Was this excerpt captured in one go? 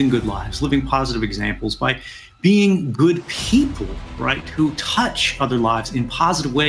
yes; 0 cuts

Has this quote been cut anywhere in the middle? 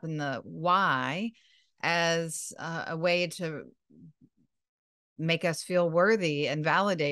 no; 0 cuts

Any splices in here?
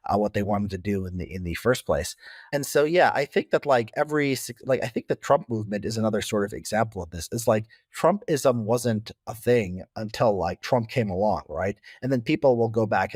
no; 0 cuts

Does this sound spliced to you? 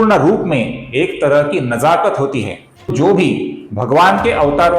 yes; 1 cut; at 2.9 s

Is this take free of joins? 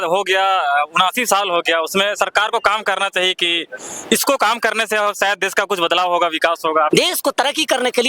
no; 1 cut; at 6.9 s

